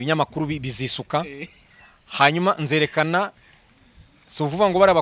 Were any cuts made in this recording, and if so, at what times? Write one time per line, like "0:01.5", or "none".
none